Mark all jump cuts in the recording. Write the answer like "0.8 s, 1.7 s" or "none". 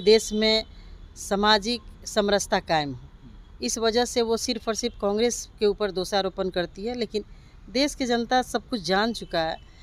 none